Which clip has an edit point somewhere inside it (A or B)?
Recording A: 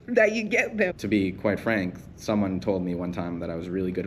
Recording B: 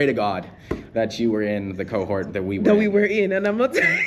A